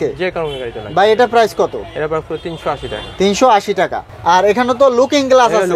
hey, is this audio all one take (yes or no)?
yes